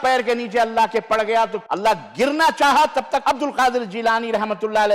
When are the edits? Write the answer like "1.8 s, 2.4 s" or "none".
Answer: 1.6 s, 3.2 s